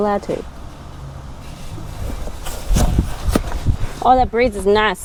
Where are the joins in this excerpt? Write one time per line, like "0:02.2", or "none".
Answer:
none